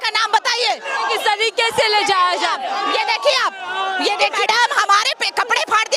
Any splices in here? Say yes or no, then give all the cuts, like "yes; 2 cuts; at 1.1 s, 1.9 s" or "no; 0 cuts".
yes; 1 cut; at 4.3 s